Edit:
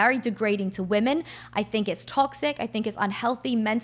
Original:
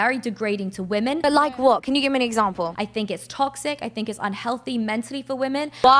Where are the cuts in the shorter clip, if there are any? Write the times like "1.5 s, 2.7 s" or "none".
1.2 s